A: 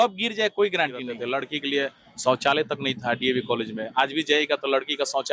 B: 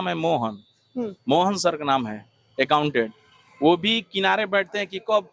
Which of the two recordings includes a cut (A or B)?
A